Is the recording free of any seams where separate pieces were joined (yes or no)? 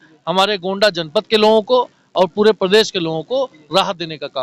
yes